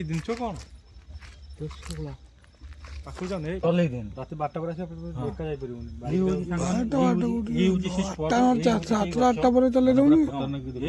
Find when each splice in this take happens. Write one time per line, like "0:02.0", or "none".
0:03.6